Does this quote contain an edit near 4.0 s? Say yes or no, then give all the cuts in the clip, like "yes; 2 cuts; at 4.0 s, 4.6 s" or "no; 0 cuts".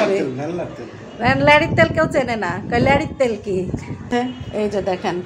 yes; 1 cut; at 4.0 s